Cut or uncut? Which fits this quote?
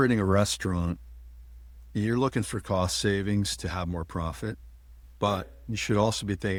uncut